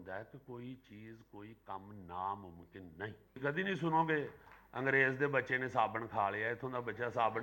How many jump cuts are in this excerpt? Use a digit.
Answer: 1